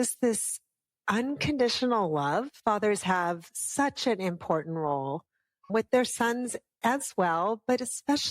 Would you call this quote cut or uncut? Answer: cut